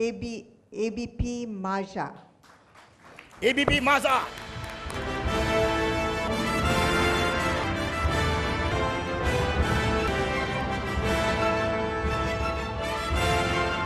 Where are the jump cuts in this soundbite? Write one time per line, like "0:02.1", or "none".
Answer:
0:04.9
0:06.3
0:07.6
0:08.7
0:10.1